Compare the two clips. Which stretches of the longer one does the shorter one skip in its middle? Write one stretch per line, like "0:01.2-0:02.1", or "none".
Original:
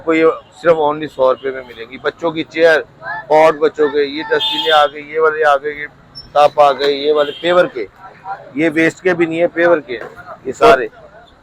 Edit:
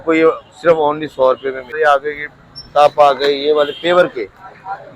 0:01.7-0:05.3